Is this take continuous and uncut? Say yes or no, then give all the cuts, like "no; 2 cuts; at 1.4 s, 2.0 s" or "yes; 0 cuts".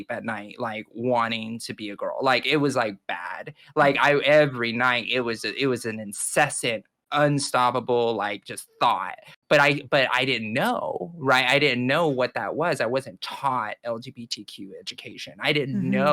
yes; 0 cuts